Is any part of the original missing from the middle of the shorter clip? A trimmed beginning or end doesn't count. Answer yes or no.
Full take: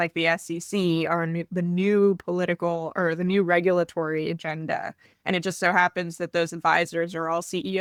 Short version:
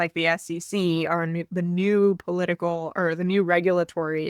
no